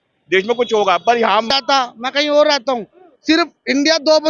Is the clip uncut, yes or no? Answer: no